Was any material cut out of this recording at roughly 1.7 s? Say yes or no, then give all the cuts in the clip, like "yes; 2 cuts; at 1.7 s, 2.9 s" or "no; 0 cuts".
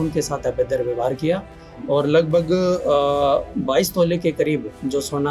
no; 0 cuts